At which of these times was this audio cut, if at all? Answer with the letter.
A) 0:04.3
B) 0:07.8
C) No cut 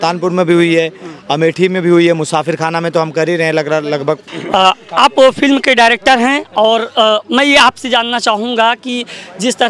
A